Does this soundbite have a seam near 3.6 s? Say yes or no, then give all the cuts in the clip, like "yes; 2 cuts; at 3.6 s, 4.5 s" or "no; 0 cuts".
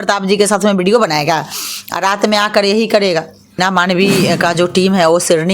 yes; 1 cut; at 3.6 s